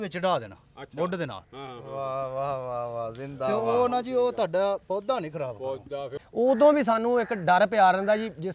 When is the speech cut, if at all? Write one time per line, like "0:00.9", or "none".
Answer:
0:06.1